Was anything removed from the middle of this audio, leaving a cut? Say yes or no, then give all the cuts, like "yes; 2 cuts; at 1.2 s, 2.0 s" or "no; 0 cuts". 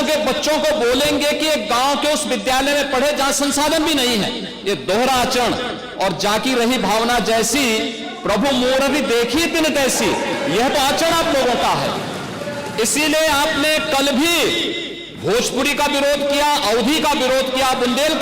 no; 0 cuts